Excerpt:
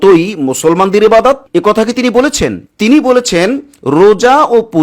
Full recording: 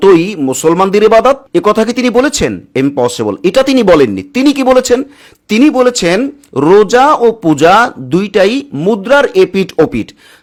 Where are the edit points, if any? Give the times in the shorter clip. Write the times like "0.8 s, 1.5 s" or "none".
2.6 s